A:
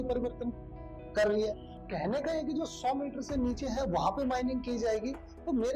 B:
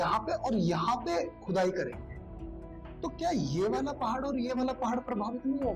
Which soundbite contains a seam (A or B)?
A